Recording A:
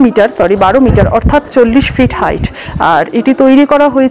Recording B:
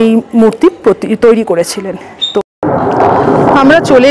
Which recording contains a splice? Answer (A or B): B